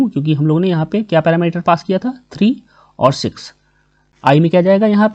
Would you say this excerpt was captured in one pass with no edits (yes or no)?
no